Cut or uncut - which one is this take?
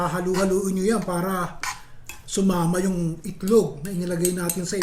uncut